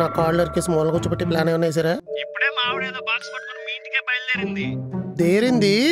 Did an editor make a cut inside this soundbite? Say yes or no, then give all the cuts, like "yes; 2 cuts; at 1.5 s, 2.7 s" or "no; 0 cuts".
yes; 1 cut; at 2.1 s